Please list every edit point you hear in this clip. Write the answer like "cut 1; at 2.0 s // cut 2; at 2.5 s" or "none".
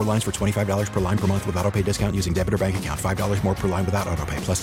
none